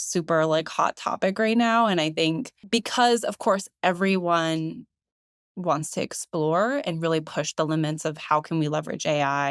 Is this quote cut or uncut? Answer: uncut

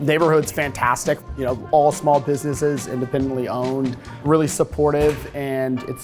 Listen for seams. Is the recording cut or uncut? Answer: cut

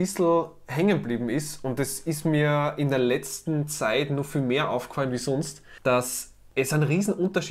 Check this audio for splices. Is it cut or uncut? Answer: uncut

